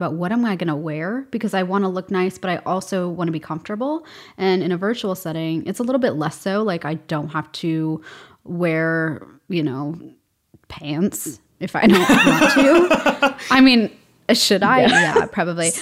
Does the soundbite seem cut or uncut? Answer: uncut